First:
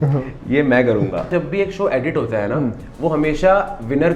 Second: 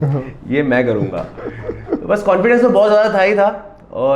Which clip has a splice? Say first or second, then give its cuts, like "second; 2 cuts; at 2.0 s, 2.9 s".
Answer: first; 1 cut; at 1.3 s